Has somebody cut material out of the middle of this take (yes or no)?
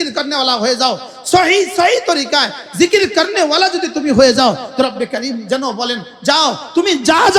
no